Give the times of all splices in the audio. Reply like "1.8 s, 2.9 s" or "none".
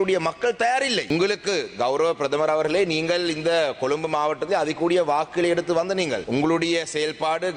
1.1 s, 6.2 s